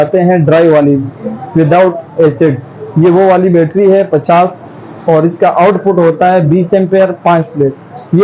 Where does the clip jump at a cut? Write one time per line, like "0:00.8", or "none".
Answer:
none